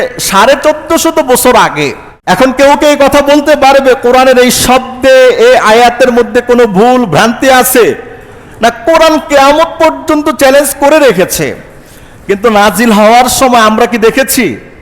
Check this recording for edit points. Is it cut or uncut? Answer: cut